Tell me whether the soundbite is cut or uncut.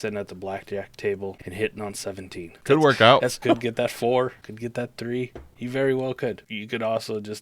cut